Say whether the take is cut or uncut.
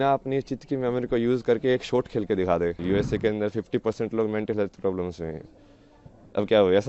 cut